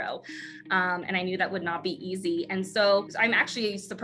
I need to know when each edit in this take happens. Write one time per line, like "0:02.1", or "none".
0:03.1